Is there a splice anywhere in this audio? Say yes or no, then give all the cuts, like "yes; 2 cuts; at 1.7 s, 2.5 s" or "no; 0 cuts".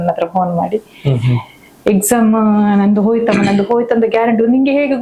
no; 0 cuts